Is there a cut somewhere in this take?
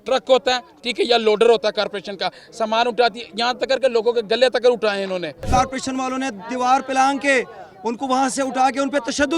yes; 1 cut; at 5.4 s

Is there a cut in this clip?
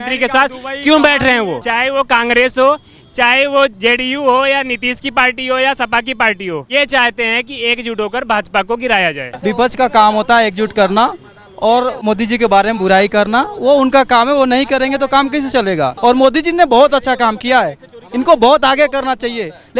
yes; 6 cuts; at 1.6 s, 3.8 s, 6.7 s, 9.3 s, 12.0 s, 15.9 s

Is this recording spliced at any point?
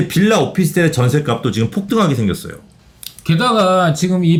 no; 0 cuts

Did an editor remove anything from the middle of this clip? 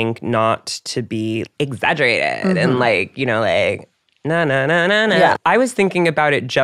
yes; 1 cut; at 5.4 s

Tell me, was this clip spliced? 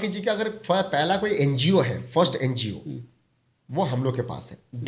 no; 0 cuts

